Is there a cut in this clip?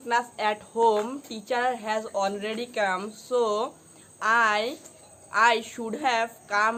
no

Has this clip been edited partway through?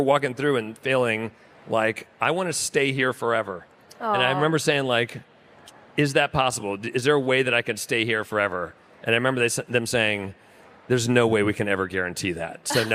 no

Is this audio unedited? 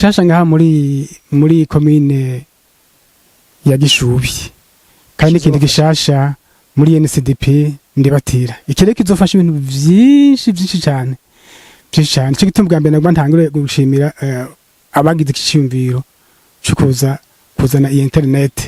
yes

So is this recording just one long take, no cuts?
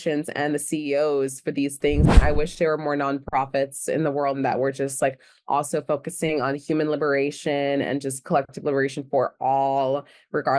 no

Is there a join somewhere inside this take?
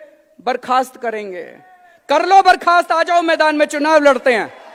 no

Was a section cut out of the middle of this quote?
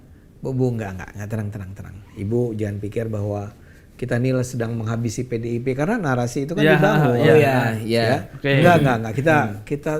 no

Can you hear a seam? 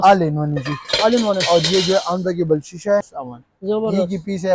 yes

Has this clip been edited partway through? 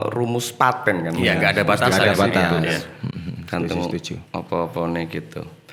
no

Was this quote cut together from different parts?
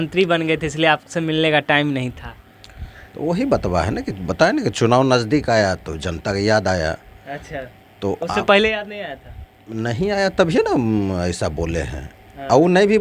no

